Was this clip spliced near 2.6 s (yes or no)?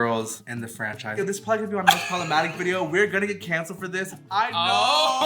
no